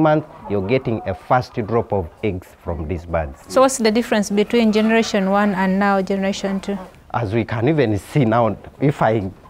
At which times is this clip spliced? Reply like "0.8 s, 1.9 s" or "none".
3.4 s